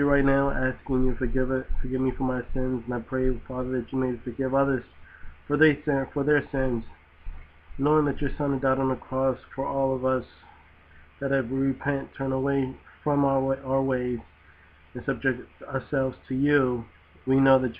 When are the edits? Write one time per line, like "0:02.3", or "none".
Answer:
0:12.9